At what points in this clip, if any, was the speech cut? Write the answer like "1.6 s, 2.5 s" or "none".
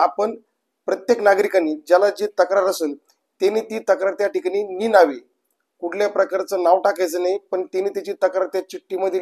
none